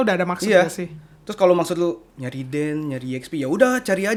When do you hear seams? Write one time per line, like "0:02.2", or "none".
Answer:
none